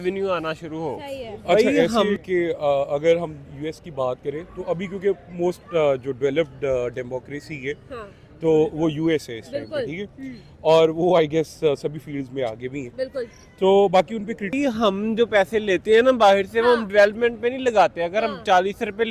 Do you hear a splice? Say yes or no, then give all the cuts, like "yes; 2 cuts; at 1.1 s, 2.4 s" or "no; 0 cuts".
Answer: yes; 2 cuts; at 1.9 s, 14.5 s